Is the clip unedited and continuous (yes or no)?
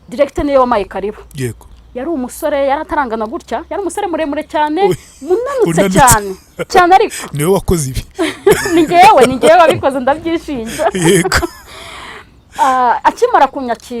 yes